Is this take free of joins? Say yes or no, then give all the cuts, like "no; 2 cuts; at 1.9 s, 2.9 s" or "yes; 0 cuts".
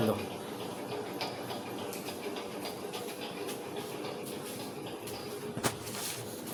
yes; 0 cuts